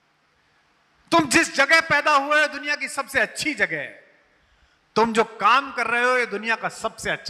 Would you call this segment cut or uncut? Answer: uncut